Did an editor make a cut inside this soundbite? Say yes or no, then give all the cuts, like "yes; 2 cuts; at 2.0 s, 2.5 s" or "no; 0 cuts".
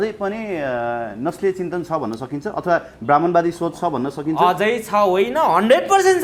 no; 0 cuts